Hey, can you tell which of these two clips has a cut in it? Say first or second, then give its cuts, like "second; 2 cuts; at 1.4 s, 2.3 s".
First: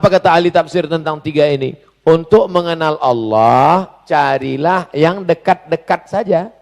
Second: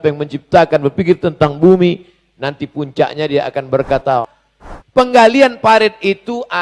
second; 1 cut; at 4.2 s